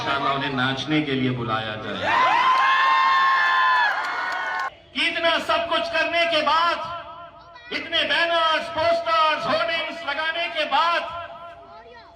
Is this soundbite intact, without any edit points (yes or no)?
no